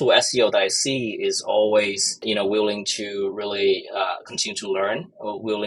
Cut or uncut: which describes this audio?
uncut